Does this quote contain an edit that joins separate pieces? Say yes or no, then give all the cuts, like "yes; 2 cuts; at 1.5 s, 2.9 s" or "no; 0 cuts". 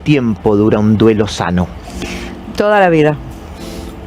yes; 1 cut; at 1.5 s